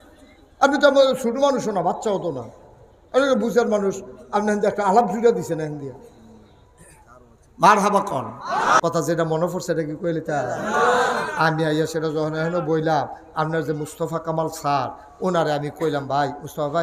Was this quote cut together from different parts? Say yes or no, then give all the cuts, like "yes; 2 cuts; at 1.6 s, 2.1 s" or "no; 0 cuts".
yes; 1 cut; at 8.8 s